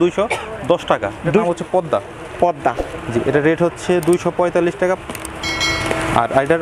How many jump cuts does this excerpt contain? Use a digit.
1